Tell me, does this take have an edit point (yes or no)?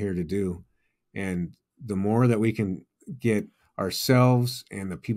no